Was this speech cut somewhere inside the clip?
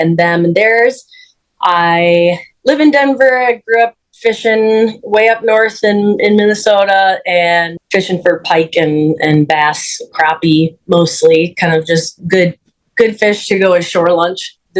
no; 0 cuts

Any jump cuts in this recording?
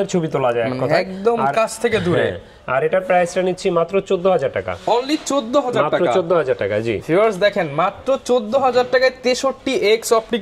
no; 0 cuts

